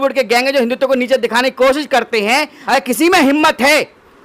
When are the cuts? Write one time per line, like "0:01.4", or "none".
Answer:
0:02.6